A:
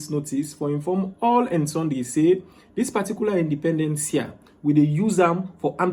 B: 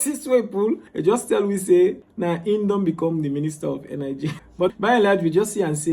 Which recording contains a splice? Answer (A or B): B